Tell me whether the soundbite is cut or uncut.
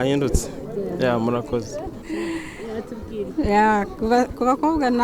uncut